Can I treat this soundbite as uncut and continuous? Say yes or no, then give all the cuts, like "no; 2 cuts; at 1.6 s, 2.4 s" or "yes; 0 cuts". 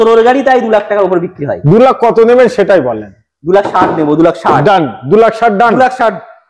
yes; 0 cuts